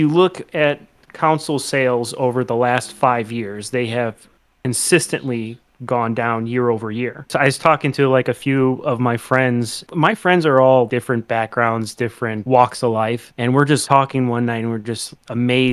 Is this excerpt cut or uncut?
cut